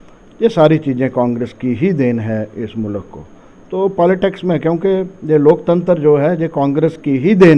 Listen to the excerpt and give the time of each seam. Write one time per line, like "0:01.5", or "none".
none